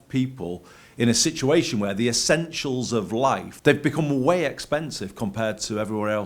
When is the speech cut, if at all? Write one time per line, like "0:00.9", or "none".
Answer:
0:03.5